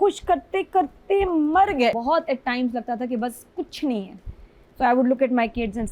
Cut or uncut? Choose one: cut